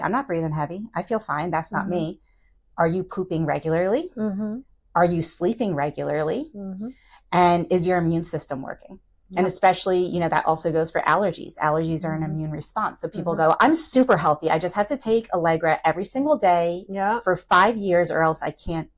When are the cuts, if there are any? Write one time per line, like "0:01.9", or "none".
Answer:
none